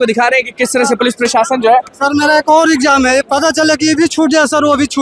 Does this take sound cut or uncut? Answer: uncut